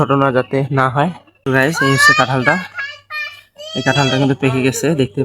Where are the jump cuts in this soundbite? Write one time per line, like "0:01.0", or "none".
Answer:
0:01.3